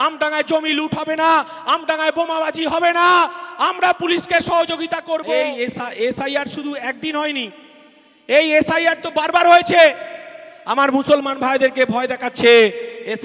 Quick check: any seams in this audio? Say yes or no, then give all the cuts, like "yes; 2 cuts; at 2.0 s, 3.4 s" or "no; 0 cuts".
yes; 1 cut; at 5.5 s